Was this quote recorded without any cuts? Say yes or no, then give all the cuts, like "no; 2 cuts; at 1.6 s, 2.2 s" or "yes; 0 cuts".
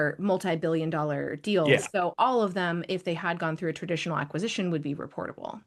yes; 0 cuts